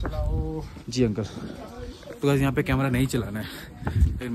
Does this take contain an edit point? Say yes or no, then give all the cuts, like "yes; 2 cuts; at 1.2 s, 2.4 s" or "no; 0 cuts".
no; 0 cuts